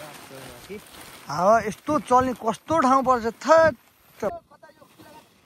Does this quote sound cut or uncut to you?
cut